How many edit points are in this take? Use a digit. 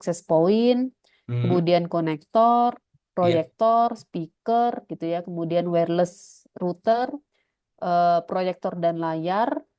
0